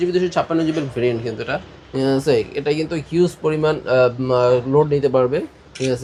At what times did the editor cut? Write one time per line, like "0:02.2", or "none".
none